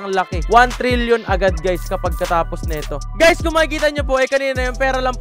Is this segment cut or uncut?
cut